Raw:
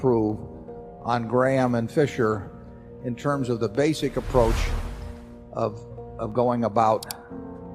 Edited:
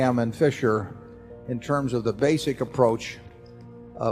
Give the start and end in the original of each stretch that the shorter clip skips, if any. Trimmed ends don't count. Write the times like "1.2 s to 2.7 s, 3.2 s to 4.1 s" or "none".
none